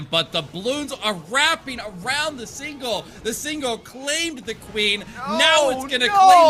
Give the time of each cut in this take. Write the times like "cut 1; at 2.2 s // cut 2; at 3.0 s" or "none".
none